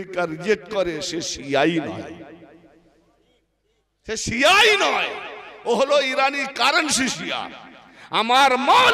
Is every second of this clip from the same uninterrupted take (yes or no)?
yes